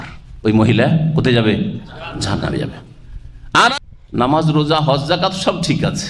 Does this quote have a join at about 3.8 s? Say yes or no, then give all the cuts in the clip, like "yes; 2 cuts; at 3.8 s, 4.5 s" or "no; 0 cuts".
yes; 1 cut; at 3.8 s